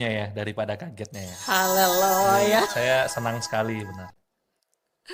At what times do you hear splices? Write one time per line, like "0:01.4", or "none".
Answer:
none